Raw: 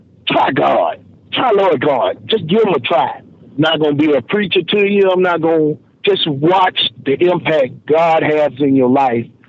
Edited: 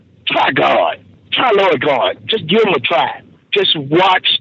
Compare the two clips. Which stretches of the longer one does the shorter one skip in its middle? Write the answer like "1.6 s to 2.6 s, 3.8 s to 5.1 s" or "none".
3.4 s to 5.9 s